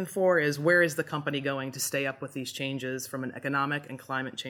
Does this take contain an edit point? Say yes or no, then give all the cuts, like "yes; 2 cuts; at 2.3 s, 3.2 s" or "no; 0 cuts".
no; 0 cuts